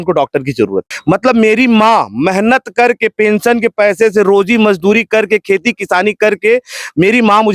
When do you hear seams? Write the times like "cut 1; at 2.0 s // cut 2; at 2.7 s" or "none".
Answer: cut 1; at 0.9 s